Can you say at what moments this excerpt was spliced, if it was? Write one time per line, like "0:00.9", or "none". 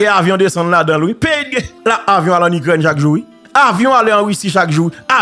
0:01.7
0:03.4